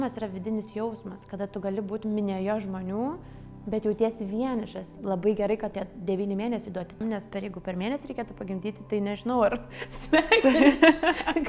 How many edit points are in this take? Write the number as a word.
two